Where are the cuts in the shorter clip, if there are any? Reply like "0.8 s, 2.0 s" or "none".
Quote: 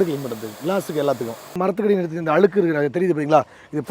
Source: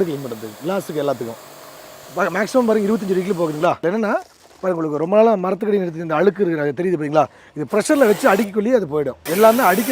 1.6 s